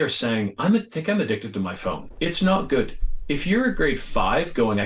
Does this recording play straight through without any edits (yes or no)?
no